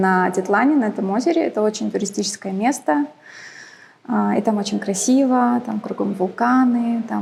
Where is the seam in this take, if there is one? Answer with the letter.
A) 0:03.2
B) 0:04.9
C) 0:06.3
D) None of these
D